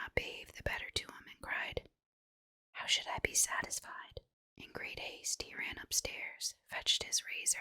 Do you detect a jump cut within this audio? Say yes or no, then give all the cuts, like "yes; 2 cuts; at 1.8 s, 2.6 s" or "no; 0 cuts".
yes; 1 cut; at 4.3 s